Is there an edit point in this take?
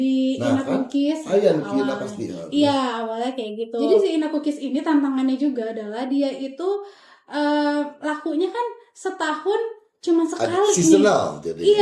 yes; 1 cut; at 3.8 s

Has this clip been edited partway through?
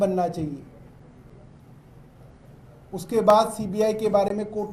no; 0 cuts

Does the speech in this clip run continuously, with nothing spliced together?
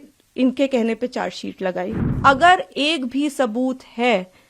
no; 1 cut; at 2.0 s

